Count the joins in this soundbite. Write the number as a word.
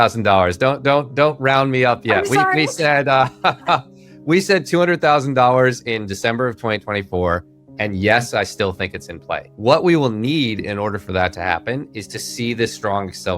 one